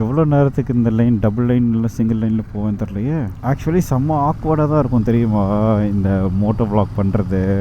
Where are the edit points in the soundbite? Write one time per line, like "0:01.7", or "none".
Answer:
0:03.3